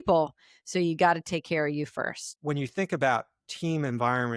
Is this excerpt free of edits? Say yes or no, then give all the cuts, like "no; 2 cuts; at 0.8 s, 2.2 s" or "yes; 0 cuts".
no; 1 cut; at 2.3 s